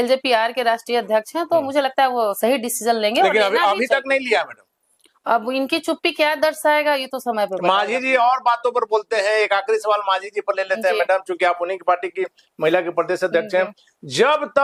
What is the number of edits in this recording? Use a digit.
0